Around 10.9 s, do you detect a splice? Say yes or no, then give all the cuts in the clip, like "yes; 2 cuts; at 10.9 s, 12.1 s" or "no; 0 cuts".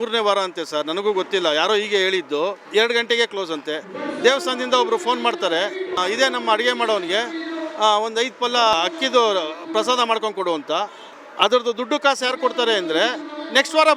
no; 3 cuts; at 2.6 s, 6.0 s, 8.7 s